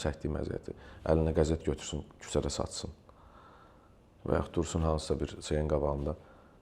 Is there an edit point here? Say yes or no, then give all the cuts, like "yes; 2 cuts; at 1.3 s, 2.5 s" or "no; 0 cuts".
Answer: no; 0 cuts